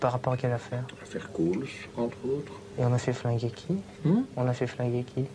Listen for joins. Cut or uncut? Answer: uncut